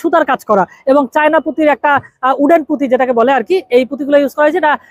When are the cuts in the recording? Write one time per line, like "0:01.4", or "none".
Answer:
none